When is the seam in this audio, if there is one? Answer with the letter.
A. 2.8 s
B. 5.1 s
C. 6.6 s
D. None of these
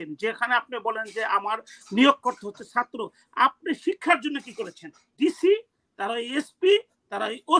B